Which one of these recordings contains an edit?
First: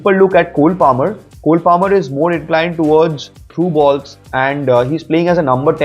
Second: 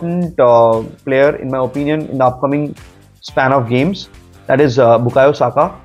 first; 1 cut; at 3.4 s

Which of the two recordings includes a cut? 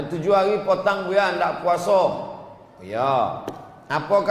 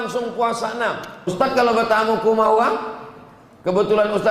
second; 1 cut; at 1.3 s

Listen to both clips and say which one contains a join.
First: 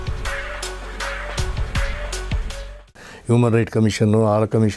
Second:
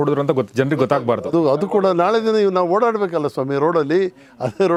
first; 1 cut; at 3.1 s

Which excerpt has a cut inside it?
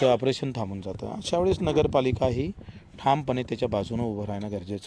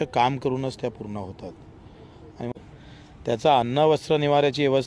second; 1 cut; at 2.5 s

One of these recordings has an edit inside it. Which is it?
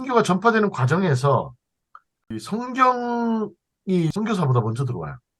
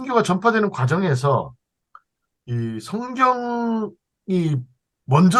first; 2 cuts; at 2.4 s, 4.1 s

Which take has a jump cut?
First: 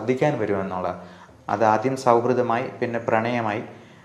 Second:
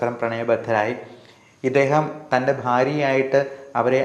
first; 1 cut; at 1.1 s

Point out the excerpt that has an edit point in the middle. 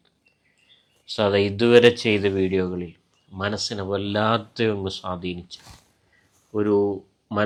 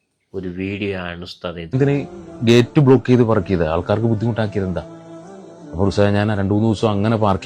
second; 1 cut; at 1.8 s

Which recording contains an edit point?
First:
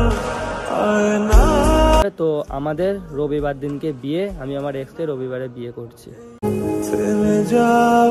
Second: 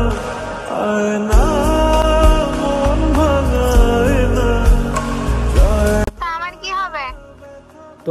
first; 1 cut; at 2.0 s

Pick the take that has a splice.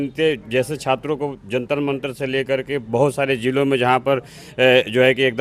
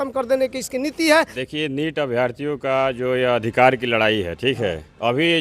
second; 1 cut; at 1.3 s

